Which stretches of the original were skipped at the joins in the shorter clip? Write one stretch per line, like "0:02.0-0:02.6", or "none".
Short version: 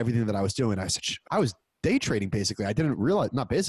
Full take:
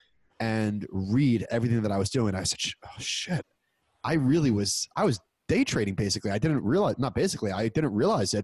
0:02.7-0:04.8